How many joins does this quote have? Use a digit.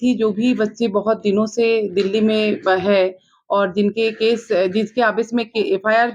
0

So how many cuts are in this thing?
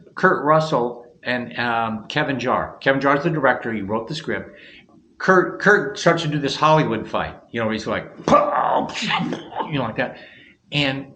1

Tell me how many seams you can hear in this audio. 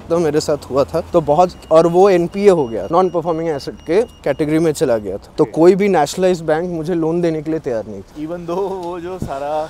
0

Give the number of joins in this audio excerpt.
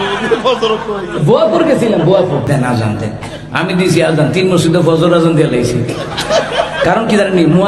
1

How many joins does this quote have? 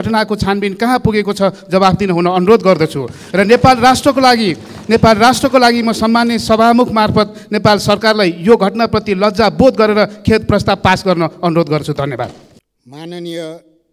0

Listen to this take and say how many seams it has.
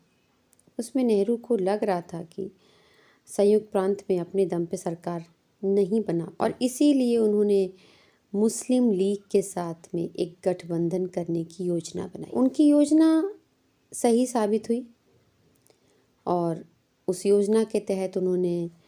2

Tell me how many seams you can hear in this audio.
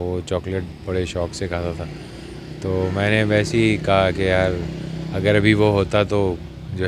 0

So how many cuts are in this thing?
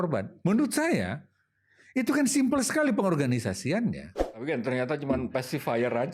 1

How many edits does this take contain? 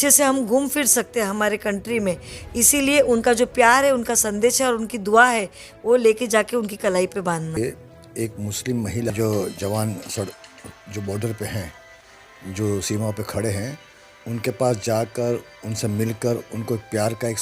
2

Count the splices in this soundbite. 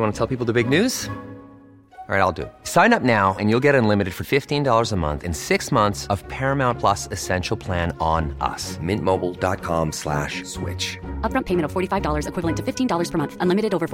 0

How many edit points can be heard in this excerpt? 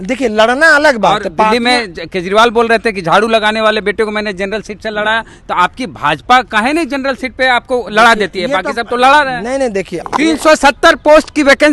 1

